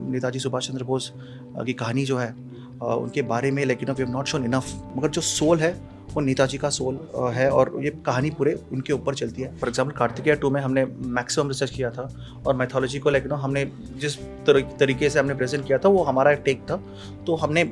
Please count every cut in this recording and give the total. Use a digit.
2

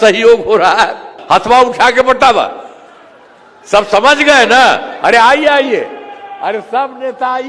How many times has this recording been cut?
1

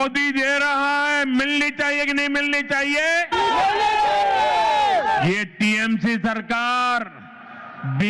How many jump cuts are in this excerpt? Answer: 0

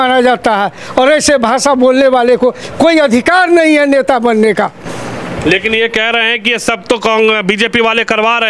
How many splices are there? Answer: 0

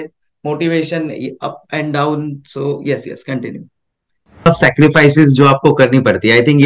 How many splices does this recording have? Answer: 1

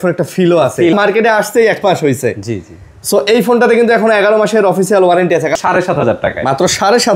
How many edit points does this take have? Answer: 2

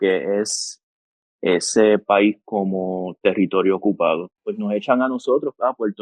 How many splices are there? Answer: 1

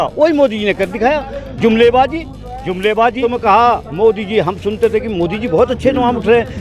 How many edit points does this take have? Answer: 1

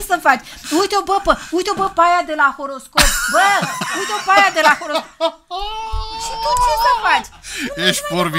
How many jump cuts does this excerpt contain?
0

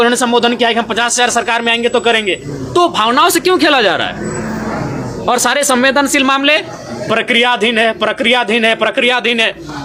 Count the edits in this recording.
0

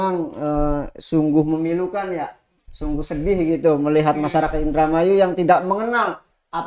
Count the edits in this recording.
0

